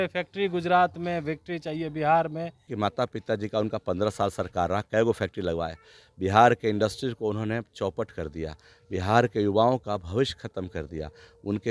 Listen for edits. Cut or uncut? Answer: cut